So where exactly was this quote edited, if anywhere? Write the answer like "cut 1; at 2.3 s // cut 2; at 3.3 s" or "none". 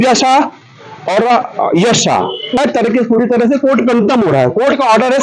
cut 1; at 2.6 s